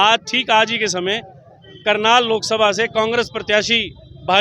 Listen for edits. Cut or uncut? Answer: uncut